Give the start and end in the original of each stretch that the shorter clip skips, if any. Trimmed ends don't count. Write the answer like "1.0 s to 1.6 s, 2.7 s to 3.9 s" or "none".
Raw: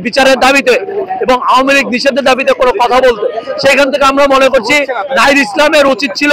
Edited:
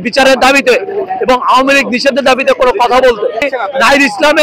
3.5 s to 4.8 s

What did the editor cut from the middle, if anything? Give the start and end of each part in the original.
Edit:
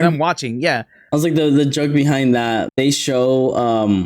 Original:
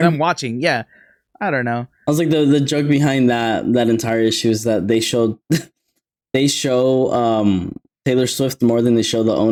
1.0 s to 1.9 s, 3.6 s to 6.2 s

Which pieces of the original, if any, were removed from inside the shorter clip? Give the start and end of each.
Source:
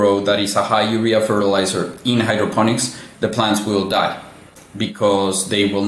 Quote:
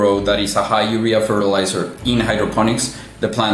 none

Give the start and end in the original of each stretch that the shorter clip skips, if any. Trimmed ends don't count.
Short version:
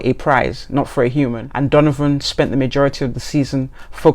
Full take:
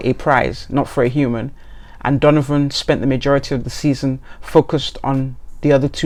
1.4 s to 1.9 s

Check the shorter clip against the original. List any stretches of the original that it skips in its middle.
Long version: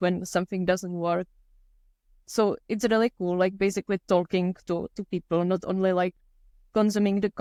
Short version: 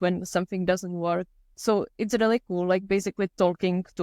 1.4 s to 2.1 s

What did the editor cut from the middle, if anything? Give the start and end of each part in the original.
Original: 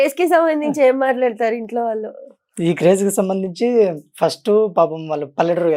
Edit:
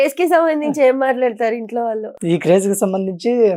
2.1 s to 2.5 s

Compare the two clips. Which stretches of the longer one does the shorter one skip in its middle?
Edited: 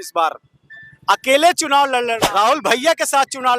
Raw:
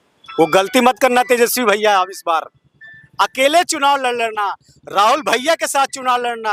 4.3 s to 4.8 s

